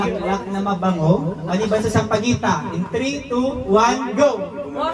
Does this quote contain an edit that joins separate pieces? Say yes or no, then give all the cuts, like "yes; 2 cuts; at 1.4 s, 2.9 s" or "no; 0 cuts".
no; 0 cuts